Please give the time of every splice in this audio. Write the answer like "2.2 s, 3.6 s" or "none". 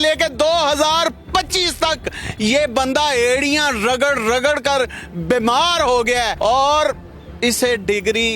6.3 s